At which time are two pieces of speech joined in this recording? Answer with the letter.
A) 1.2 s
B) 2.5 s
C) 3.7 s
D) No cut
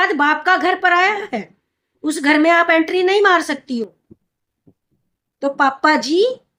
D